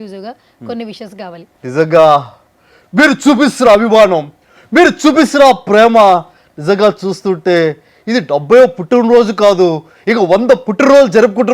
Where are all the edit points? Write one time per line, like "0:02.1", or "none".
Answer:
0:01.5